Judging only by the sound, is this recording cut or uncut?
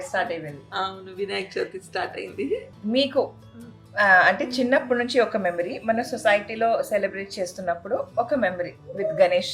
cut